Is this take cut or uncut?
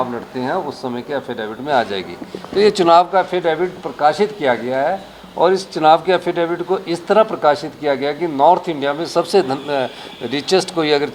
uncut